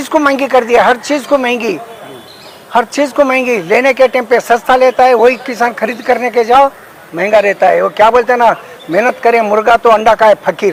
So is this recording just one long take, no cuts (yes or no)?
yes